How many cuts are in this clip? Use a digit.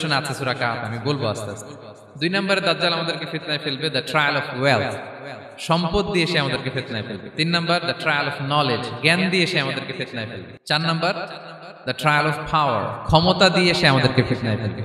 1